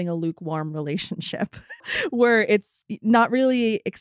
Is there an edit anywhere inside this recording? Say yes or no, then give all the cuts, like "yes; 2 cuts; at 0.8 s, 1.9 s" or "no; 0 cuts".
yes; 1 cut; at 1.9 s